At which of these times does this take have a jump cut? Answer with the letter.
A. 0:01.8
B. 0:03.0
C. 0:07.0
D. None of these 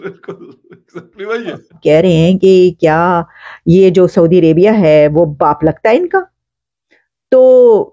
A